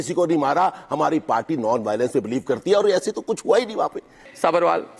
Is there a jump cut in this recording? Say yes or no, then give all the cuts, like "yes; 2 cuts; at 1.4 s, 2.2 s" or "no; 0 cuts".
yes; 1 cut; at 4.1 s